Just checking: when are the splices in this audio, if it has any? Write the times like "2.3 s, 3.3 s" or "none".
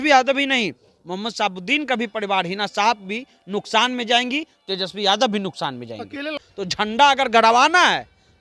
6.4 s